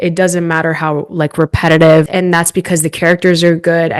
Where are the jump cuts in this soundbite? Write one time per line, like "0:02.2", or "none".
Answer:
0:02.1